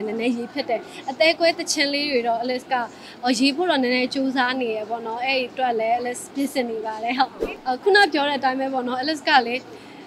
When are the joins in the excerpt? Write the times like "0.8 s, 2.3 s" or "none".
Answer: 7.5 s